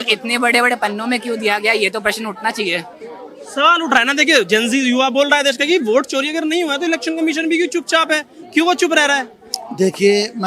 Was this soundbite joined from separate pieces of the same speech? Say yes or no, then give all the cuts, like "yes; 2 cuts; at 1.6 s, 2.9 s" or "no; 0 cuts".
no; 0 cuts